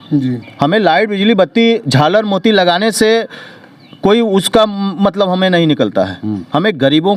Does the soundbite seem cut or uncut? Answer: uncut